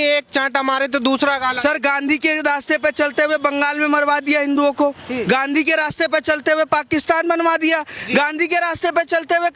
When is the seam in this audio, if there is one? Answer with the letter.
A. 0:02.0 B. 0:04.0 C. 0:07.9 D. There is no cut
D